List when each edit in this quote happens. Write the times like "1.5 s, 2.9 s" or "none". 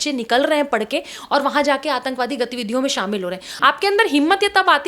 3.4 s